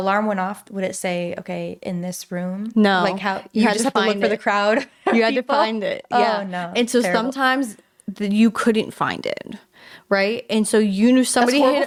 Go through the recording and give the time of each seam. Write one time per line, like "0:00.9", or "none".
none